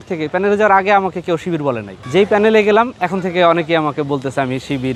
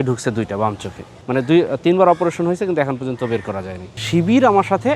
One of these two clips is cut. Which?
second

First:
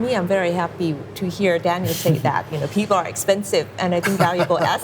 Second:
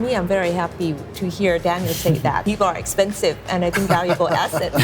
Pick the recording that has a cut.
second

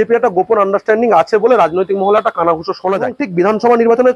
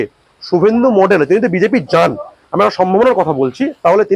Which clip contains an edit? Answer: first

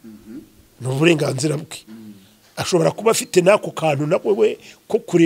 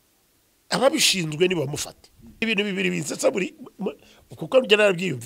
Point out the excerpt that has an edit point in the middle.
second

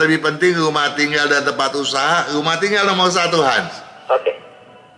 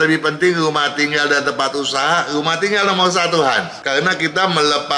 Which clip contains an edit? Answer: second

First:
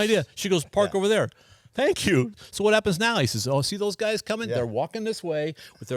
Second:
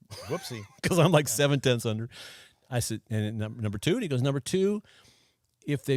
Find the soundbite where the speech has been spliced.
first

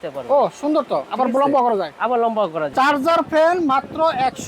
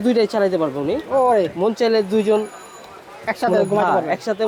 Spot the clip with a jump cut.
first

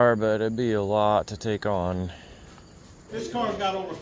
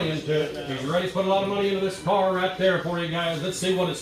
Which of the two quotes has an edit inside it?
first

